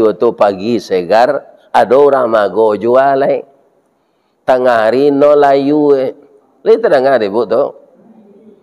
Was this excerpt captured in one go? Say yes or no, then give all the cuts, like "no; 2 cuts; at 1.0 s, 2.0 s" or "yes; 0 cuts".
yes; 0 cuts